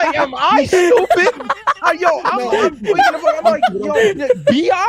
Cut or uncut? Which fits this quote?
uncut